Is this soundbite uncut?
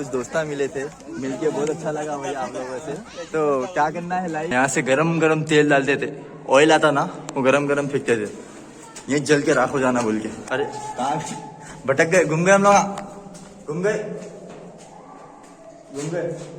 no; 2 cuts; at 4.5 s, 10.4 s

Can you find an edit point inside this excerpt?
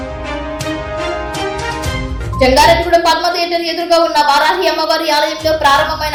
no; 0 cuts

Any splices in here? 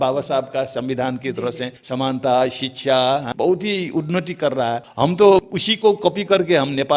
yes; 4 cuts; at 1.7 s, 3.3 s, 4.9 s, 5.6 s

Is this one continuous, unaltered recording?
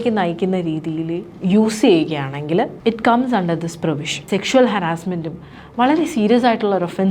no; 3 cuts; at 1.3 s, 2.7 s, 4.2 s

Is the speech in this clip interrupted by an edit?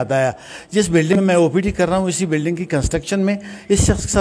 yes; 1 cut; at 1.1 s

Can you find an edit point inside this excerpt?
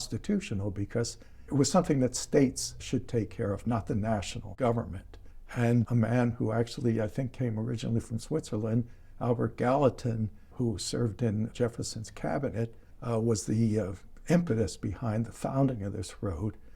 yes; 5 cuts; at 1.4 s, 5.7 s, 10.4 s, 11.5 s, 12.9 s

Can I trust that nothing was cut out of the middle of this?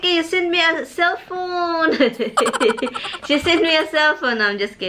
yes; 0 cuts

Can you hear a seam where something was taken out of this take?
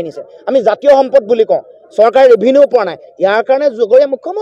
no; 0 cuts

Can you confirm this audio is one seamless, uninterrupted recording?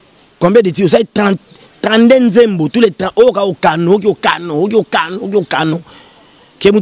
yes; 0 cuts

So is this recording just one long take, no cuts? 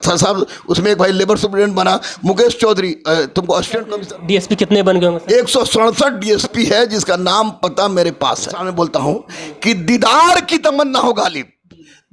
no; 2 cuts; at 3.9 s, 8.7 s

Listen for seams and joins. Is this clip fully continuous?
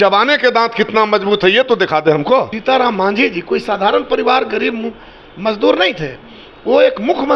no; 1 cut; at 2.5 s

